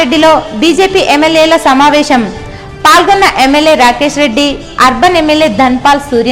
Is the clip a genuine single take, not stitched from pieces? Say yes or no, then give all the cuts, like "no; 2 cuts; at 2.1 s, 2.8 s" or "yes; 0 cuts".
yes; 0 cuts